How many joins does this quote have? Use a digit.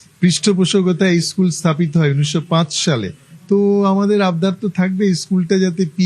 0